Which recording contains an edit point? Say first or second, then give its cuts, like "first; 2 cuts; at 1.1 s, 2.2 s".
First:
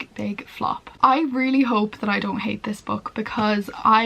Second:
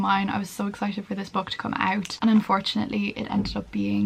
first; 1 cut; at 0.9 s